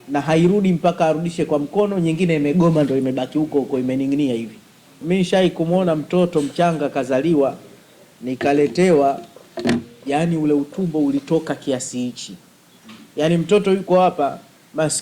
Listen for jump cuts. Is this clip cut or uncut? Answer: cut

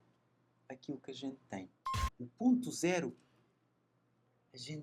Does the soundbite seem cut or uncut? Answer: cut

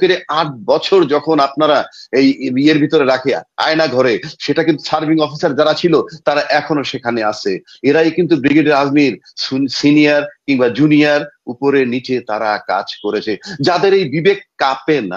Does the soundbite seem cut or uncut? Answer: uncut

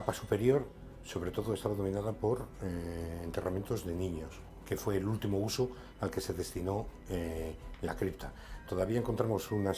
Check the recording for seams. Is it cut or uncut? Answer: uncut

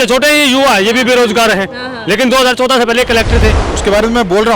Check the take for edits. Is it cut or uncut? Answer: cut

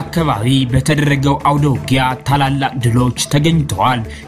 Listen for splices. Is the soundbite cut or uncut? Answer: uncut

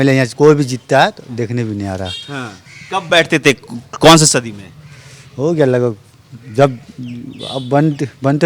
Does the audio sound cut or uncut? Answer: uncut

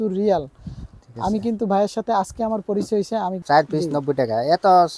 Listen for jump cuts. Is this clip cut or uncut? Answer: cut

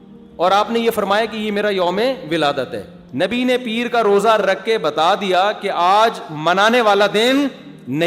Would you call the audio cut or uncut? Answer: cut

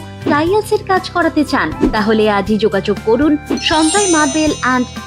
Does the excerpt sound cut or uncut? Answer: uncut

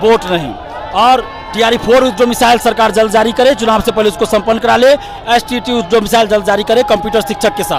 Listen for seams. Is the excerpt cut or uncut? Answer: uncut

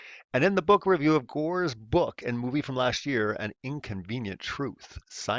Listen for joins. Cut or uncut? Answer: cut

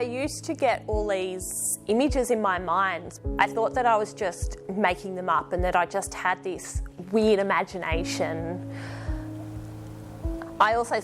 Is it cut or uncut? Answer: cut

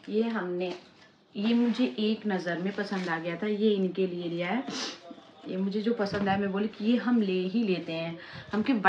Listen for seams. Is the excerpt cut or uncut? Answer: uncut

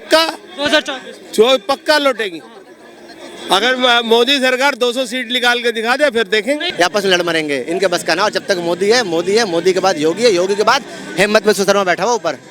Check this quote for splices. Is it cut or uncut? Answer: cut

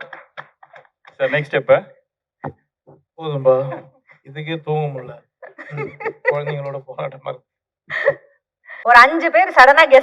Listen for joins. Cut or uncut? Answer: cut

